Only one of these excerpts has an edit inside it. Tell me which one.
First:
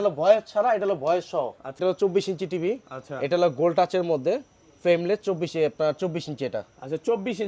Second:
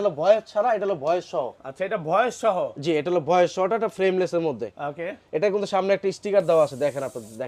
first; 1 cut; at 1.8 s

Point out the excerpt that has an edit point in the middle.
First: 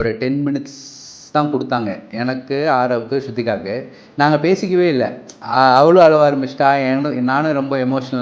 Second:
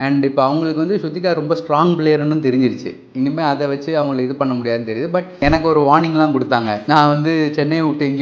second; 2 cuts; at 5.4 s, 6.8 s

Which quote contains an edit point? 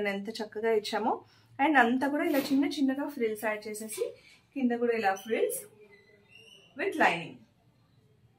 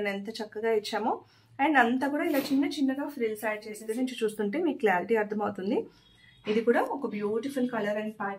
second; 1 cut; at 4.0 s

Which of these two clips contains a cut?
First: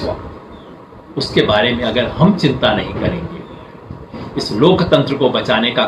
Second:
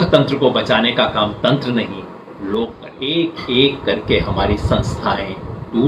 second; 1 cut; at 2.9 s

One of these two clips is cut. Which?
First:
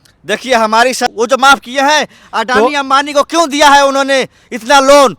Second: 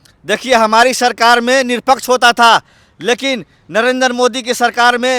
first; 1 cut; at 1.1 s

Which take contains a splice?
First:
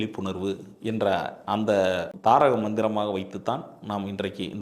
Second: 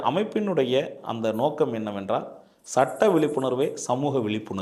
first; 1 cut; at 2.1 s

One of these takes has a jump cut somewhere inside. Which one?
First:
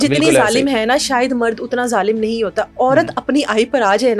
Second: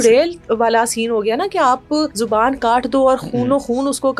second; 1 cut; at 2.2 s

